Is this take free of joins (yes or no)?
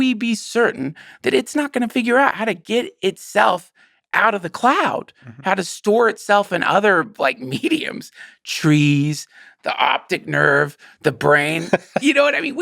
yes